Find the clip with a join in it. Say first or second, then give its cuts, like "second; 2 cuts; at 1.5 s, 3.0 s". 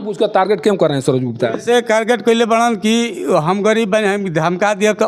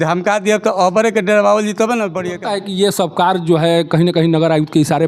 second; 1 cut; at 2.2 s